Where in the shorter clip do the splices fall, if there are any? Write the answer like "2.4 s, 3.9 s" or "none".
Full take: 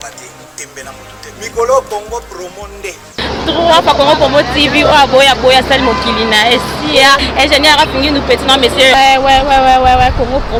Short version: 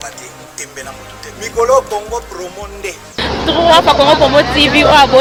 none